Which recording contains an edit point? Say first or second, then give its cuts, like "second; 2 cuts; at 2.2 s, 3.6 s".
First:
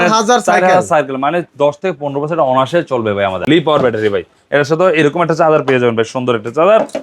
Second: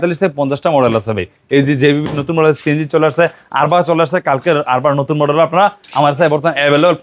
first; 1 cut; at 3.4 s